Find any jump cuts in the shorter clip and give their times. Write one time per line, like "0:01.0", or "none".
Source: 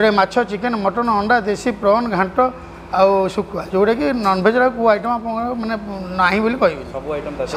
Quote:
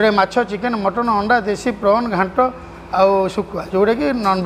none